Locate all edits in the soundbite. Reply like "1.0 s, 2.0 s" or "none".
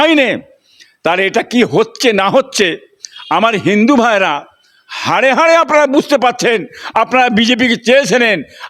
none

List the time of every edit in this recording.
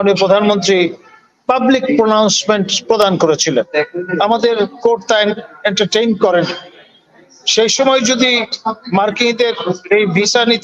3.7 s

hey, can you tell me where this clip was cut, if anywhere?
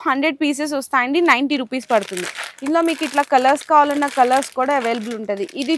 none

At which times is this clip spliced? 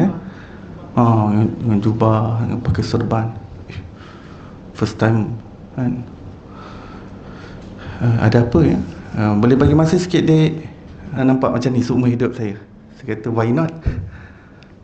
11.2 s

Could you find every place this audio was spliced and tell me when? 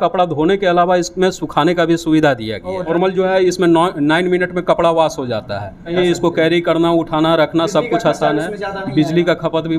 2.9 s, 5.9 s

